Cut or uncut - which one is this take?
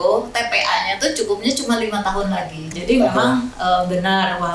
cut